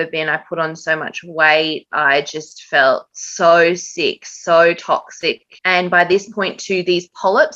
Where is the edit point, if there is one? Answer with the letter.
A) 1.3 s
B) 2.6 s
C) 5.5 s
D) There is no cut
C